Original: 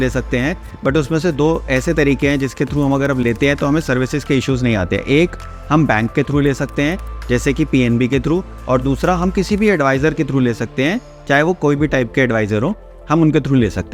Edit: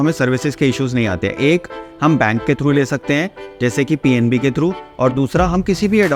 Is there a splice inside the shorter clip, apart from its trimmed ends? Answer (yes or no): no